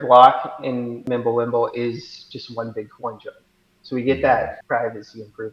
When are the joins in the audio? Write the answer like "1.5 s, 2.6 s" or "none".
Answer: 1.0 s, 4.6 s